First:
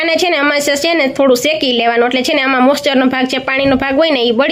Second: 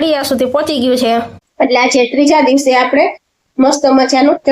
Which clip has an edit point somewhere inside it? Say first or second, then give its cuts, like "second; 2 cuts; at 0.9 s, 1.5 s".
second; 1 cut; at 1.4 s